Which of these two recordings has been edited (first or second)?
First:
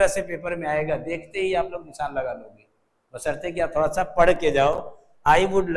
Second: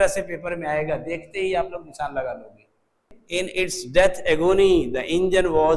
second